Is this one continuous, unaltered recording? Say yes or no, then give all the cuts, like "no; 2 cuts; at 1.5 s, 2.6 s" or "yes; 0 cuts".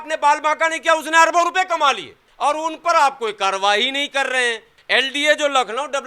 no; 2 cuts; at 2.2 s, 4.7 s